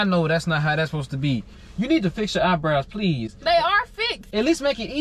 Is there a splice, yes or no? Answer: yes